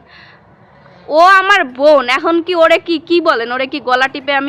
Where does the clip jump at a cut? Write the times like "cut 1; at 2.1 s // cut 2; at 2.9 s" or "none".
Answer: none